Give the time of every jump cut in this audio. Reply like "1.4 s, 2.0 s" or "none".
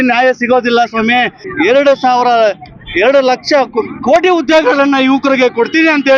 1.4 s